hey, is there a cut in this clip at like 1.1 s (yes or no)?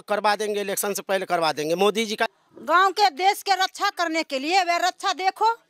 no